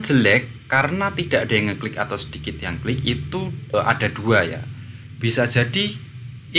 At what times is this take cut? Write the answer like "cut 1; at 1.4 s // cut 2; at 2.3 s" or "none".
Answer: cut 1; at 3.7 s